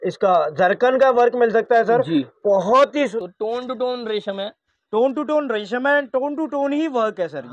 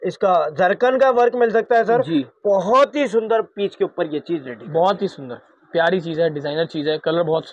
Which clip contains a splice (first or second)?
first